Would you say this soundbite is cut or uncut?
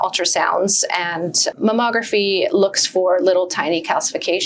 cut